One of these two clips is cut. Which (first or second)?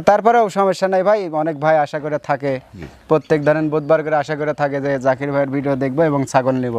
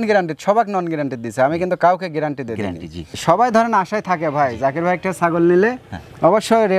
second